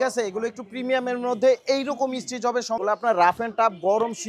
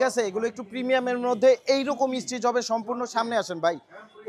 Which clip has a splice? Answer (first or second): first